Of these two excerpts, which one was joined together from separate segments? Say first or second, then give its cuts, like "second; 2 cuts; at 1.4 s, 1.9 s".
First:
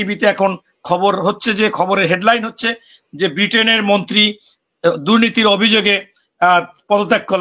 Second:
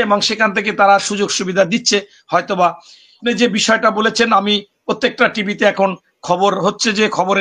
second; 1 cut; at 3.2 s